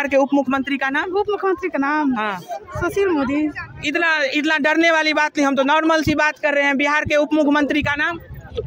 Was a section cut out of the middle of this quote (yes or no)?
no